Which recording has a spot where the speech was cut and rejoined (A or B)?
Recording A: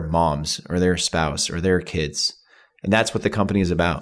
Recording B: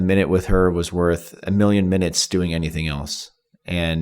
B